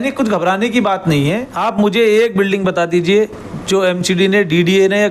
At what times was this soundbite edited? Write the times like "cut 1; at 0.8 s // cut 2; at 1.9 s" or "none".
cut 1; at 1.3 s

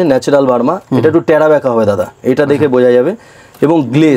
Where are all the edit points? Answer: none

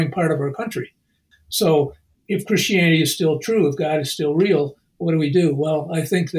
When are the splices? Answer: cut 1; at 1.3 s

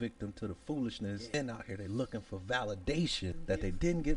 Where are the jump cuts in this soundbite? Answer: cut 1; at 1.3 s // cut 2; at 3.4 s

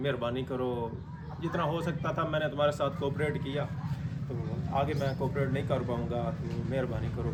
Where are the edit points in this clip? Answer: none

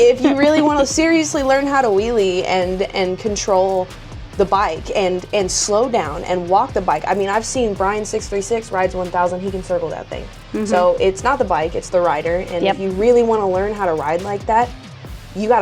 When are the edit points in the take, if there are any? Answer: none

